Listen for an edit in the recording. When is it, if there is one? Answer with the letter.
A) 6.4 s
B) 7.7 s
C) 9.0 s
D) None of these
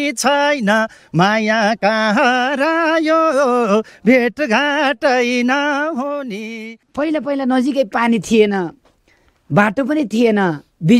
A